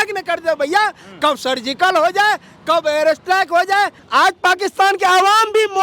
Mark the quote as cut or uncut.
cut